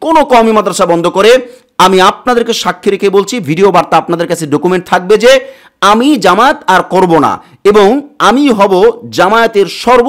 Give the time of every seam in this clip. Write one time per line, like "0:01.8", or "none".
none